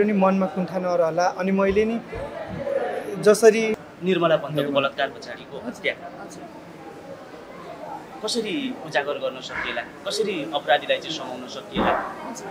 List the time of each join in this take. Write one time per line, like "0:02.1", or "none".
0:03.8